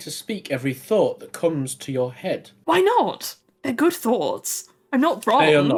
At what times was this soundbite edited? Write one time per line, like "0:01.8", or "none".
none